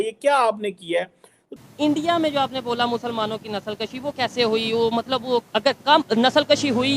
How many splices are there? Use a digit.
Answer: 1